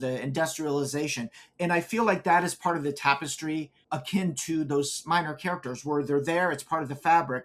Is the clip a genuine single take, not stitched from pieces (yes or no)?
no